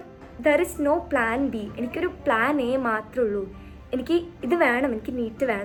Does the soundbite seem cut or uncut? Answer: uncut